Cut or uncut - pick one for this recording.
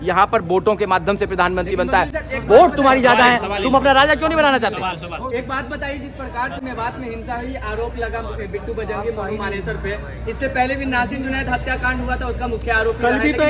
uncut